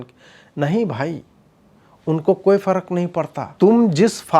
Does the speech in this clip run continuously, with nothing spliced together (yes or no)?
no